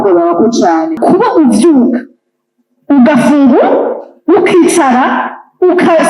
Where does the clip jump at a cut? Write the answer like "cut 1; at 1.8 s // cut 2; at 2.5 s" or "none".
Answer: cut 1; at 0.9 s